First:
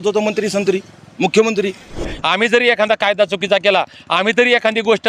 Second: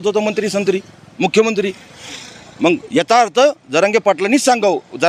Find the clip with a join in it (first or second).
first